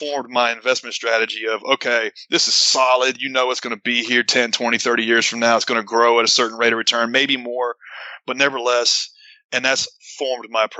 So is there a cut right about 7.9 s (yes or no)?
no